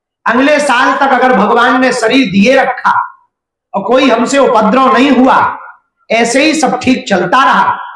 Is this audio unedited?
yes; 0 cuts

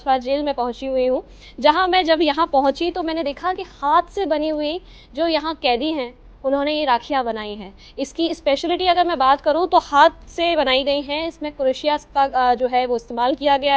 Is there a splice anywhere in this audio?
no; 0 cuts

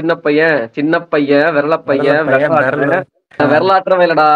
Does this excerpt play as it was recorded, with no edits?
no; 1 cut; at 3.3 s

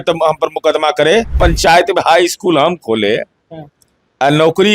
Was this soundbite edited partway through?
yes; 1 cut; at 1.3 s

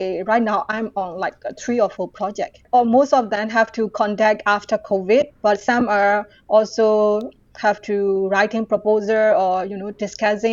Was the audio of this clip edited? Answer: yes; 1 cut; at 2.6 s

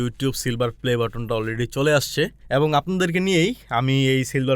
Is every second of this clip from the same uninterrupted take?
no; 1 cut; at 2.4 s

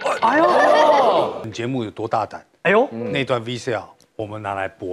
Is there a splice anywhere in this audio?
yes; 1 cut; at 1.4 s

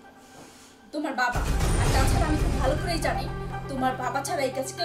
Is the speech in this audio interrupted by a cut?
no; 0 cuts

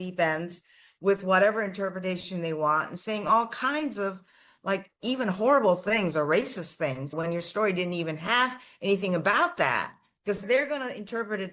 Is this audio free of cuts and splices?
no; 2 cuts; at 7.1 s, 10.4 s

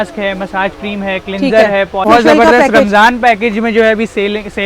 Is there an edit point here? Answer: yes; 1 cut; at 2.0 s

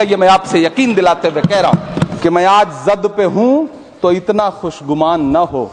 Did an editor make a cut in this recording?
yes; 1 cut; at 2.1 s

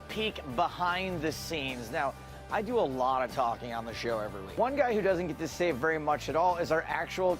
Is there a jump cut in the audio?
yes; 1 cut; at 4.4 s

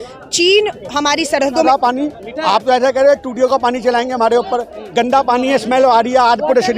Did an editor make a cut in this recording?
yes; 1 cut; at 1.6 s

